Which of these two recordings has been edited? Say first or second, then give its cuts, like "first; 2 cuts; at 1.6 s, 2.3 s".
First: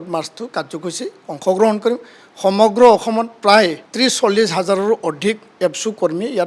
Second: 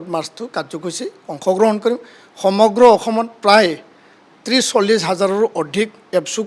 first; 1 cut; at 3.8 s